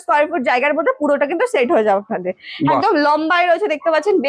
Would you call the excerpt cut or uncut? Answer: uncut